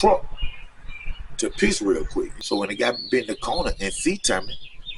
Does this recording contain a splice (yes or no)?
yes